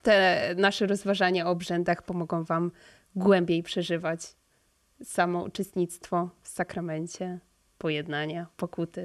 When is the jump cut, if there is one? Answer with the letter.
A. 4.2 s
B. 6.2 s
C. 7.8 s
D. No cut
D